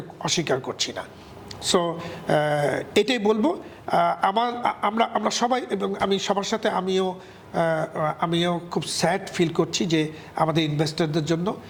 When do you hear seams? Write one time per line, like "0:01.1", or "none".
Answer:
none